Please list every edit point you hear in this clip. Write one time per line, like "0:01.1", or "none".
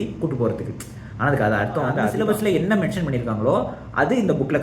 0:02.0